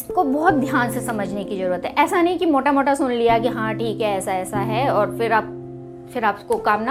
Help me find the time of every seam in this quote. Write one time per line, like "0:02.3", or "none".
none